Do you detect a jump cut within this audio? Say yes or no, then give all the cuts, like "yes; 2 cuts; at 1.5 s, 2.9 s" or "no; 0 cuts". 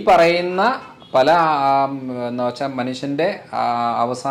no; 0 cuts